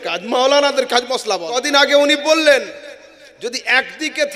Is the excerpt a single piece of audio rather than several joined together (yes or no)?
no